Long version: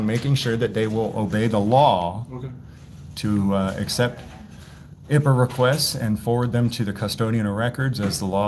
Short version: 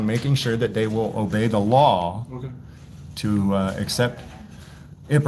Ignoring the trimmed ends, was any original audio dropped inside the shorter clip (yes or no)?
no